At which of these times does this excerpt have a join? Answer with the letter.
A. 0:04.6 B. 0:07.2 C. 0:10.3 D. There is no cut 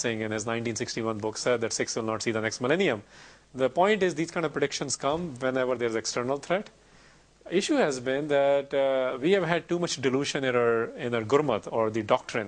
D